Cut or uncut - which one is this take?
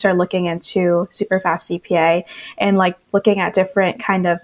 uncut